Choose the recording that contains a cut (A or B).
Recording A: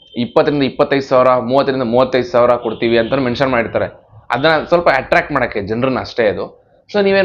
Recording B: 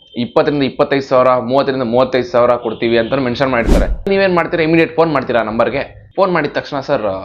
B